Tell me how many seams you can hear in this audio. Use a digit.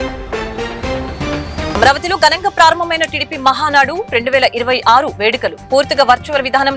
0